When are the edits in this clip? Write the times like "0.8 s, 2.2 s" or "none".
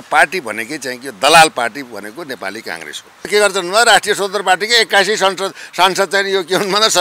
3.3 s

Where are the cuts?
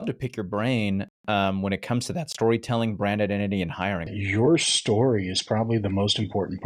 4.2 s

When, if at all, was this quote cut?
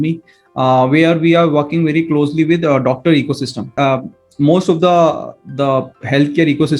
3.7 s

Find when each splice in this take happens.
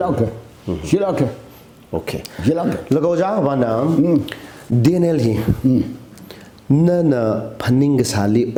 none

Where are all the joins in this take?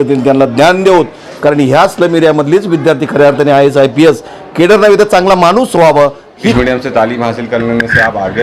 6.5 s

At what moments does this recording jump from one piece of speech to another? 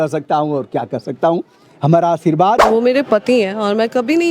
2.7 s

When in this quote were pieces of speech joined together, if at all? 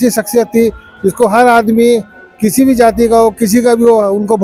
none

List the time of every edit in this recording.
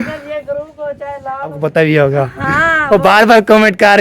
1.7 s

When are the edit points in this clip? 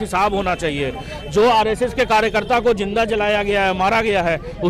none

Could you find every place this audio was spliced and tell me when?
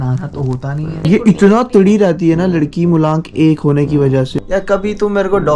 0.9 s, 4.3 s

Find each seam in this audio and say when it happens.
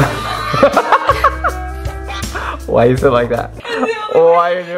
none

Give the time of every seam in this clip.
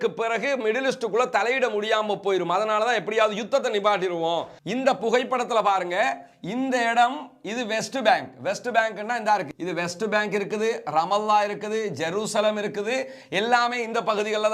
4.6 s

